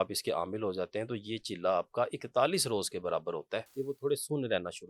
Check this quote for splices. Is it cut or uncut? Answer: cut